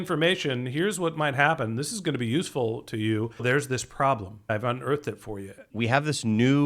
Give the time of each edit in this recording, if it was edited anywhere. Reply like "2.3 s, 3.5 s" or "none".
3.4 s, 4.5 s, 5.7 s

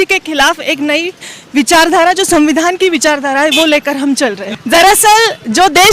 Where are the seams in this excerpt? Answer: 4.5 s

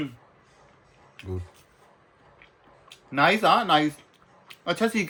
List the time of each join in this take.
none

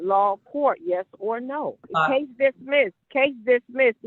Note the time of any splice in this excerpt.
1.9 s, 3.0 s

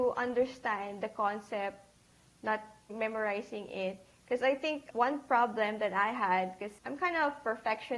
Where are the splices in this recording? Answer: 2.9 s, 4.8 s, 6.7 s

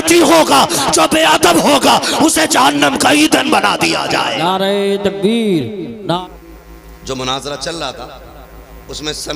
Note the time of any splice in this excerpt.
6.2 s

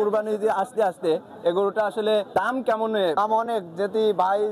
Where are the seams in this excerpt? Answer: 2.3 s, 3.2 s

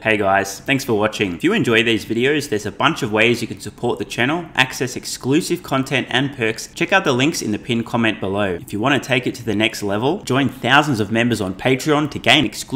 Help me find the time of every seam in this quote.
0.9 s, 6.7 s, 8.6 s

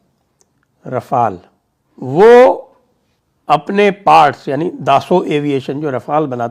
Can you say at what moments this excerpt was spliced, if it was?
none

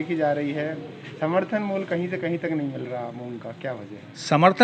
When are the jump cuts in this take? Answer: none

